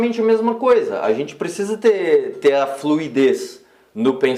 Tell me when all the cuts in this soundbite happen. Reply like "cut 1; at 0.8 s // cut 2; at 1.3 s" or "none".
none